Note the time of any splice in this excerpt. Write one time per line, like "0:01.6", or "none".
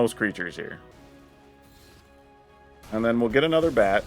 0:00.9
0:02.8

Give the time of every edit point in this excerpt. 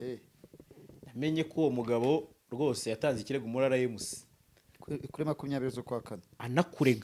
none

